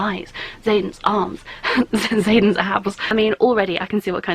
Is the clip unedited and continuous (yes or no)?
no